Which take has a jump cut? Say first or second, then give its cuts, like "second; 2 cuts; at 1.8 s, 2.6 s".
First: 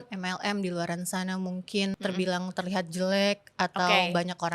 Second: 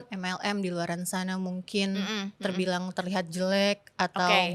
first; 1 cut; at 1.9 s